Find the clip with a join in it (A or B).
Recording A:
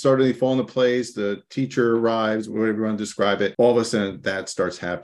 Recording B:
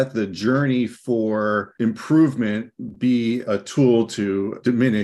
A